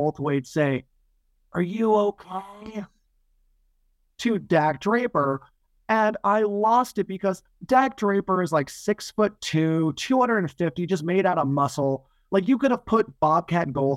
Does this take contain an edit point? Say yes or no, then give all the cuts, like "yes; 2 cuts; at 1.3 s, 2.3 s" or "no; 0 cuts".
no; 0 cuts